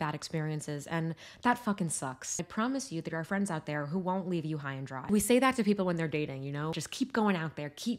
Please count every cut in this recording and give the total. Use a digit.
3